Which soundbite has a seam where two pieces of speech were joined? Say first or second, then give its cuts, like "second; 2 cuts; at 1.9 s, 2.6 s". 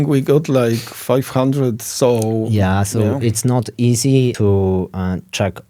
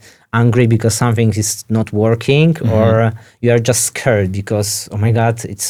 first; 1 cut; at 4.4 s